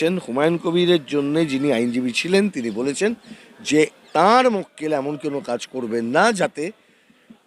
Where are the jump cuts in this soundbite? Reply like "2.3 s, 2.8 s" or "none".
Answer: none